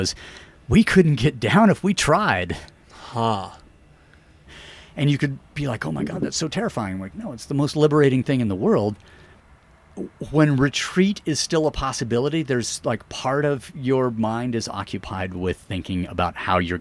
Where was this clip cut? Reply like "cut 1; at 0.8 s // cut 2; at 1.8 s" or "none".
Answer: cut 1; at 4.4 s // cut 2; at 9.5 s